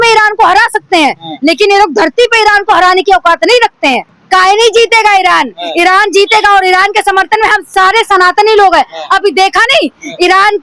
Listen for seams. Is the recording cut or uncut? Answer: cut